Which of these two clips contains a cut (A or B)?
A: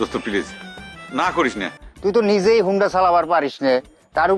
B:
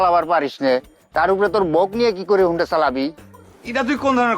A